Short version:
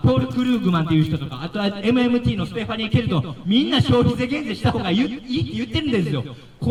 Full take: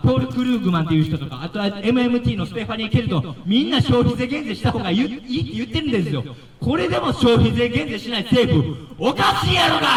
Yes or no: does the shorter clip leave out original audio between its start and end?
no